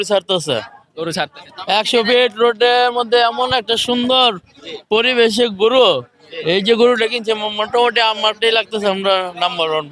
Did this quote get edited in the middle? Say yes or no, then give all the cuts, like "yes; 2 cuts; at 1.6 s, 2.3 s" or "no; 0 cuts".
no; 0 cuts